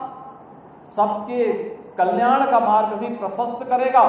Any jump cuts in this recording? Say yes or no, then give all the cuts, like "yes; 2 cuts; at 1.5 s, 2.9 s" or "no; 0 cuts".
no; 0 cuts